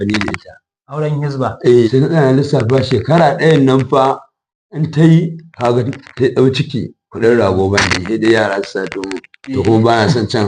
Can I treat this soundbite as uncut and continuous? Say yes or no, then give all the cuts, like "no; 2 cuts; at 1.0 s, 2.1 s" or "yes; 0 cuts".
no; 1 cut; at 1.9 s